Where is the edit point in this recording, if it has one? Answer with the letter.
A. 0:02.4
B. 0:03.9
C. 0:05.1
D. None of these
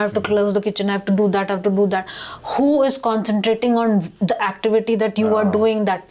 D